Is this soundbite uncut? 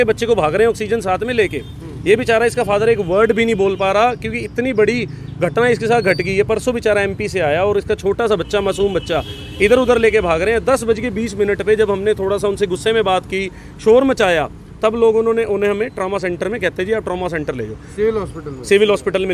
yes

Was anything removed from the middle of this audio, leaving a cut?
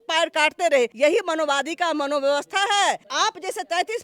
yes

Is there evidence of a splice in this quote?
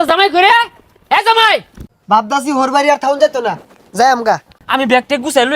yes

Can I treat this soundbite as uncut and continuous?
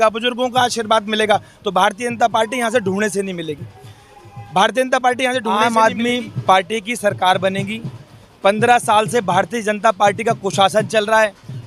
no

